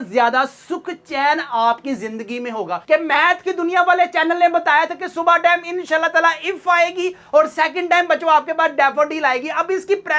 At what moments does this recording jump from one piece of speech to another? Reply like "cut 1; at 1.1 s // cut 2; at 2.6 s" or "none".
cut 1; at 2.8 s